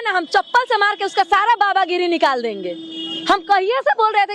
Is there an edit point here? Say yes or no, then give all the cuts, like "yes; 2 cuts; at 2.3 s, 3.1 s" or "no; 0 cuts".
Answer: no; 0 cuts